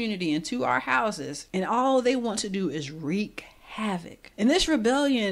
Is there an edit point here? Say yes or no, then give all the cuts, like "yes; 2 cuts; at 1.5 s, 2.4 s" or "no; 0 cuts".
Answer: yes; 2 cuts; at 1.3 s, 4.2 s